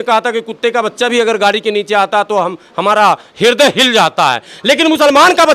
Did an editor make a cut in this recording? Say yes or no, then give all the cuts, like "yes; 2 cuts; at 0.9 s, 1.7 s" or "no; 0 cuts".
no; 0 cuts